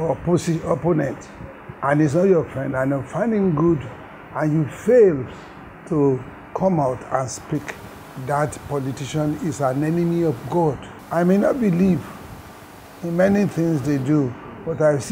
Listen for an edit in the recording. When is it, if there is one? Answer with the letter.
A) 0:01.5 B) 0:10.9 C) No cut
B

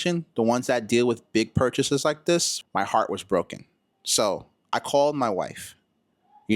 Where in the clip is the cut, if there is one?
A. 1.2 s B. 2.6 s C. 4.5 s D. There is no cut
B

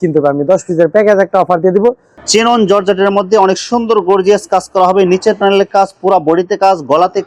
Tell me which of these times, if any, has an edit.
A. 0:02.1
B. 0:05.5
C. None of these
A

